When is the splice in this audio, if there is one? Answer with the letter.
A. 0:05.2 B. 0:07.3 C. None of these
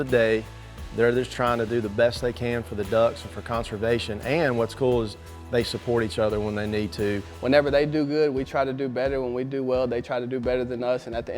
B